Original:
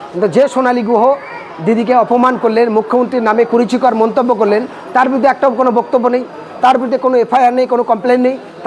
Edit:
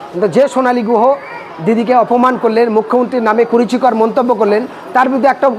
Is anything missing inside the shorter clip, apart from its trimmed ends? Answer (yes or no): no